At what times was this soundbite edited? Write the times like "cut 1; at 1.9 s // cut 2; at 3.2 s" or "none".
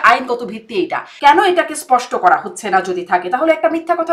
cut 1; at 1.0 s